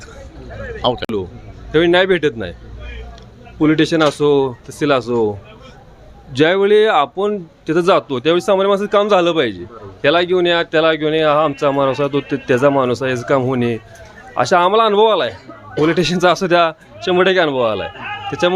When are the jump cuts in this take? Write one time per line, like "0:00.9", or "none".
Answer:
0:01.1